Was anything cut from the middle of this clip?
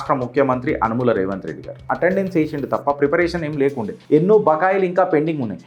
yes; 2 cuts; at 1.9 s, 4.0 s

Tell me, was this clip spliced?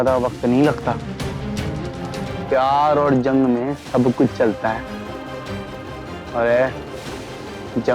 yes; 1 cut; at 2.3 s

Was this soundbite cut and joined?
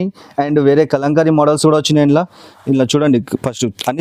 no; 0 cuts

